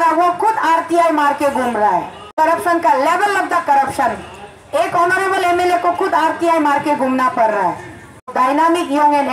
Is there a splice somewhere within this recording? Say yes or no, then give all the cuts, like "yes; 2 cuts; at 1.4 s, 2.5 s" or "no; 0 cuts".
yes; 2 cuts; at 2.2 s, 8.3 s